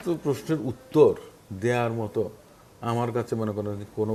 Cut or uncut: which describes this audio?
uncut